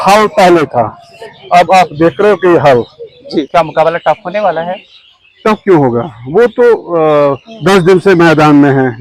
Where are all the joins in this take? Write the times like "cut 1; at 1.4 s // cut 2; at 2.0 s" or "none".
cut 1; at 3.5 s